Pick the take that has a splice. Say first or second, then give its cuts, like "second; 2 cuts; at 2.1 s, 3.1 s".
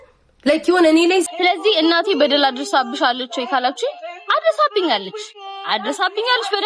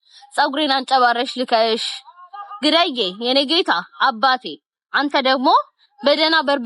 first; 1 cut; at 1.3 s